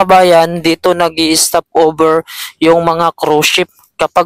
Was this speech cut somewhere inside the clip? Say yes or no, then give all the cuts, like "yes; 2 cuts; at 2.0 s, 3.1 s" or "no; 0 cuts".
no; 0 cuts